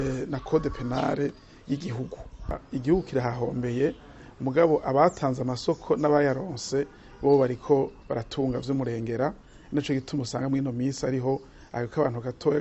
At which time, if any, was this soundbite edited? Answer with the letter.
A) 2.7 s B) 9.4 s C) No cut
A